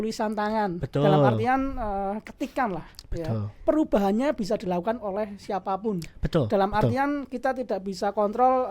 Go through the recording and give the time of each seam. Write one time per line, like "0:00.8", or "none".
0:03.6